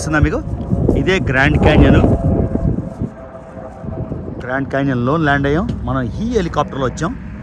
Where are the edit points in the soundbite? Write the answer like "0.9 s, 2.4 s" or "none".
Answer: none